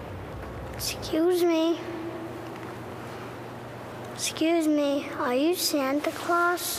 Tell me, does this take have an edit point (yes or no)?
no